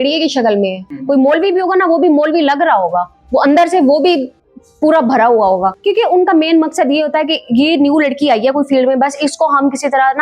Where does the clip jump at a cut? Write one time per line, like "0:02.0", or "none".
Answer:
0:00.9
0:05.7